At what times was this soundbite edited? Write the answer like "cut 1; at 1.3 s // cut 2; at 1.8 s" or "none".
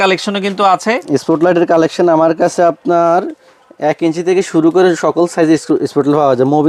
none